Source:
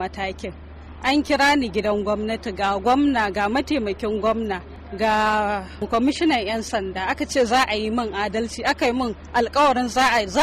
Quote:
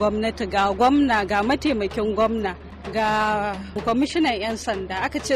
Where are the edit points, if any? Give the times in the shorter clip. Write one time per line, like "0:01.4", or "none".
none